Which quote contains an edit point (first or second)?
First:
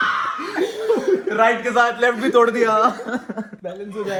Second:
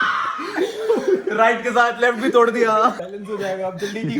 second